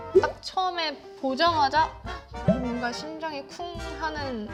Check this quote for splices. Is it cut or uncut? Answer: uncut